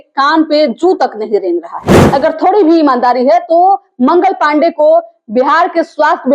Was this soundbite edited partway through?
yes; 1 cut; at 1.9 s

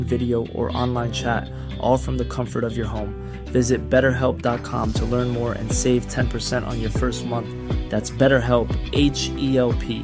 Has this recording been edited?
no; 0 cuts

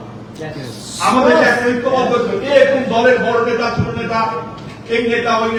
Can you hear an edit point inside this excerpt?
no; 0 cuts

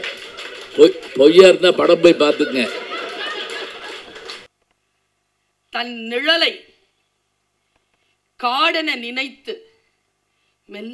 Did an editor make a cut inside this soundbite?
yes; 1 cut; at 4.5 s

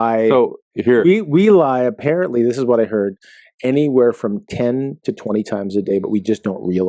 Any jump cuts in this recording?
no; 0 cuts

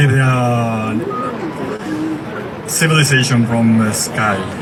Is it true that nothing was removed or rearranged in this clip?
yes; 0 cuts

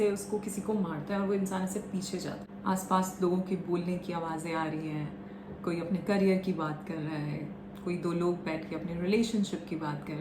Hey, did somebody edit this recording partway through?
yes; 1 cut; at 2.5 s

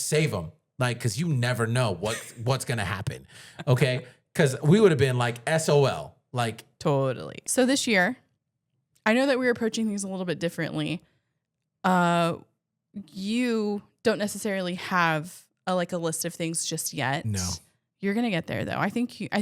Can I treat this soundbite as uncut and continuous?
no; 1 cut; at 7.4 s

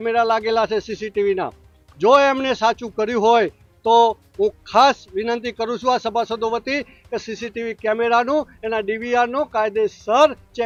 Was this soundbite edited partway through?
no; 0 cuts

